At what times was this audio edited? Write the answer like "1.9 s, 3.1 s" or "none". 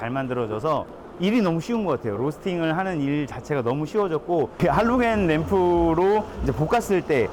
1.0 s, 4.6 s